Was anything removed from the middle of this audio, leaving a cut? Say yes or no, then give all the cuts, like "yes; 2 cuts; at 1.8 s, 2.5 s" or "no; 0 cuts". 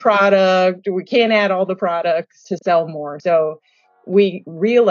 yes; 1 cut; at 2.5 s